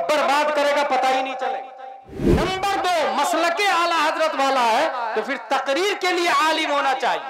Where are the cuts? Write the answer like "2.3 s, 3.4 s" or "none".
2.2 s